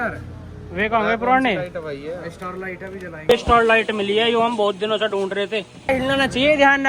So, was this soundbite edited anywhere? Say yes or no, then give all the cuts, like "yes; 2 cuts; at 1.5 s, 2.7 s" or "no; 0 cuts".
yes; 1 cut; at 5.9 s